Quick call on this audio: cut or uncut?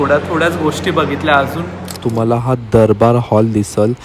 cut